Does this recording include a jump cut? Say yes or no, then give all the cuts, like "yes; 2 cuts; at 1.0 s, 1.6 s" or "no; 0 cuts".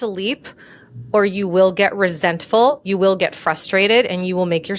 no; 0 cuts